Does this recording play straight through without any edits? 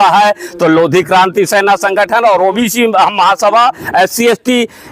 no; 1 cut; at 2.6 s

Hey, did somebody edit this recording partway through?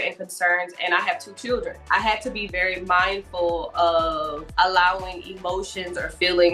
yes; 1 cut; at 1.8 s

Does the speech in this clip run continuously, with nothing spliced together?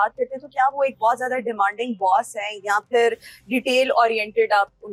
yes; 0 cuts

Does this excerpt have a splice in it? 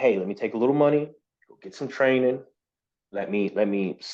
no; 0 cuts

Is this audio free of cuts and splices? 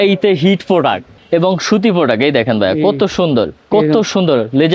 no; 2 cuts; at 1.1 s, 3.6 s

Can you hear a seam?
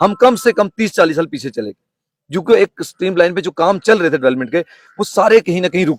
no; 0 cuts

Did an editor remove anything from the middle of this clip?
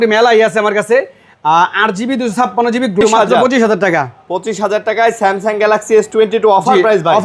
yes; 1 cut; at 3.0 s

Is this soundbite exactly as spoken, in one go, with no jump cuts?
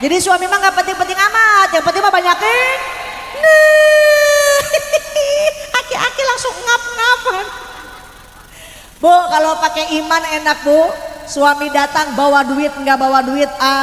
yes; 0 cuts

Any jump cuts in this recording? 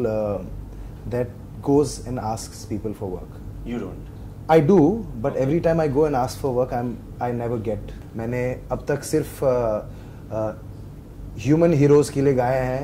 yes; 1 cut; at 8.0 s

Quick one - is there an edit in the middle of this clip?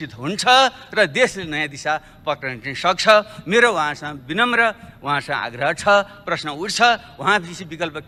no; 0 cuts

